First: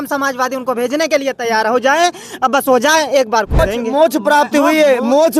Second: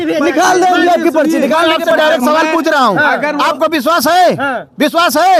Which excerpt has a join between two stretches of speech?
first; 1 cut; at 3.6 s

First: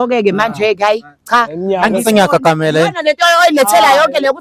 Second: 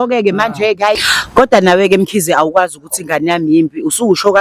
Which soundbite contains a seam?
second; 1 cut; at 1.1 s

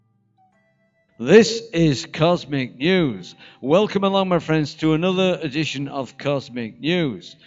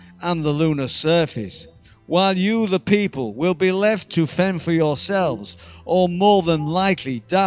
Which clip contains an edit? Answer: second; 1 cut; at 4.6 s

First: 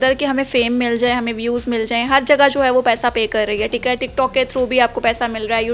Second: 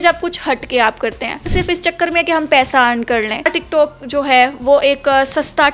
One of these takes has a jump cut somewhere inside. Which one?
second; 2 cuts; at 1.5 s, 3.6 s

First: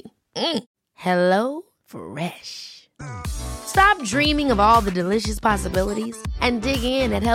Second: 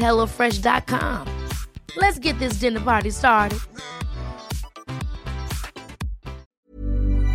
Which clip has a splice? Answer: second; 1 cut; at 6.5 s

